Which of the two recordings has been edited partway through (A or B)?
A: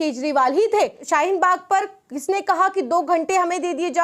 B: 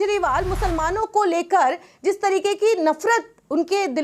A